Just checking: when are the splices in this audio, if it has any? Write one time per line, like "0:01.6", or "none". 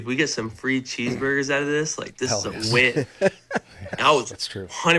none